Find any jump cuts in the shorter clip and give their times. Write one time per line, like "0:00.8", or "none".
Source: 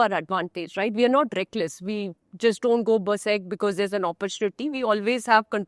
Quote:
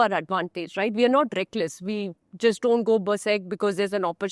none